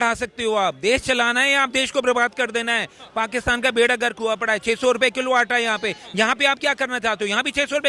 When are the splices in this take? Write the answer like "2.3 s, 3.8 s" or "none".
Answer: none